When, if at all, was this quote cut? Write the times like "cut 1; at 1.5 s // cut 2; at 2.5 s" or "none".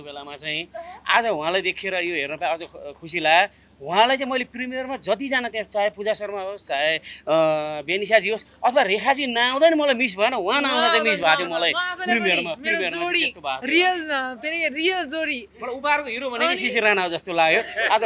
none